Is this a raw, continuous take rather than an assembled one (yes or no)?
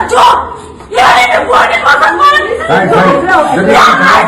no